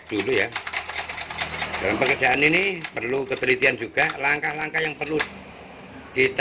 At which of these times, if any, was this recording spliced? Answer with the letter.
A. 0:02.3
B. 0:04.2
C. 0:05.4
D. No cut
B